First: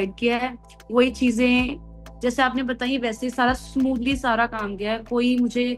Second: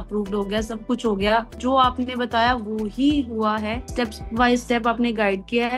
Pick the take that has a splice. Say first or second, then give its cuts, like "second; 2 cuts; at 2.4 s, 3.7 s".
second; 2 cuts; at 1.6 s, 3.8 s